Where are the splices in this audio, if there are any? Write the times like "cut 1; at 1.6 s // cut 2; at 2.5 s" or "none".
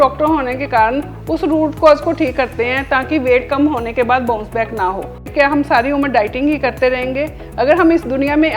cut 1; at 5.2 s